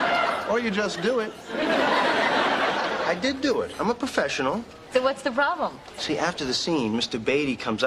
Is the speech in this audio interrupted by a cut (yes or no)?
no